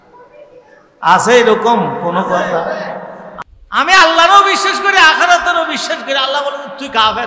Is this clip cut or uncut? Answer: cut